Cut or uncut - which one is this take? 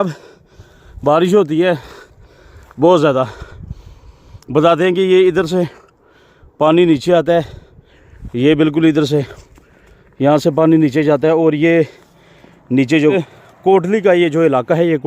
cut